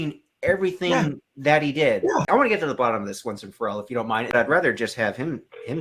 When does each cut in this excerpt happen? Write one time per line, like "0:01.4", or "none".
0:02.2
0:04.3